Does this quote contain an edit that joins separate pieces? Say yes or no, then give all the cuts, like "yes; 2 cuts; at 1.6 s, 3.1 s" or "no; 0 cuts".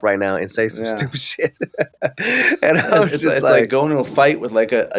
no; 0 cuts